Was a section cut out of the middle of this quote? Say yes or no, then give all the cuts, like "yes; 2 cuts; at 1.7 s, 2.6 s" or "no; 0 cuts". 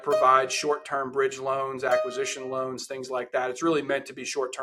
no; 0 cuts